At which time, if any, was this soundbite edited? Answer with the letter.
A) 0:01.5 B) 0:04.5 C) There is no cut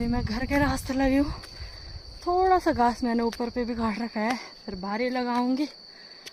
C